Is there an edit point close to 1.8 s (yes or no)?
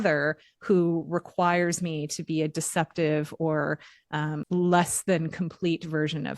no